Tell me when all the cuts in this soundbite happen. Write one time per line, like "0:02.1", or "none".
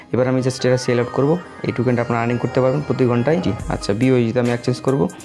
0:03.5